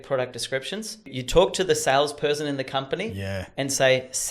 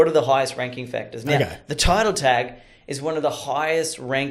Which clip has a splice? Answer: first; 1 cut; at 1.1 s

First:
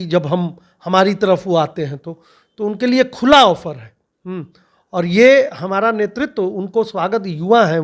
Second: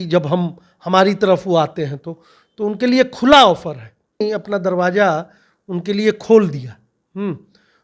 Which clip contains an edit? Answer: second; 1 cut; at 4.2 s

